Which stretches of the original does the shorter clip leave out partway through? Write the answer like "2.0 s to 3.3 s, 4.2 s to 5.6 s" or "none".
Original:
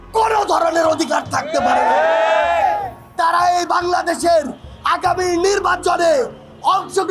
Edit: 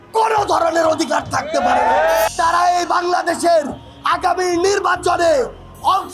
2.3 s to 3.1 s